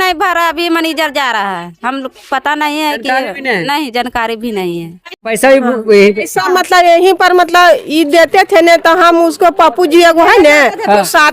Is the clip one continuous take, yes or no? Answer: no